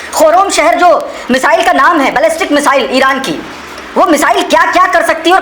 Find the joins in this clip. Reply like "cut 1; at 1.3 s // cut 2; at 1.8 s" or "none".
none